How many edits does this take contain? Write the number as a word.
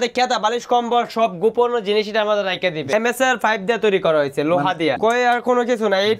two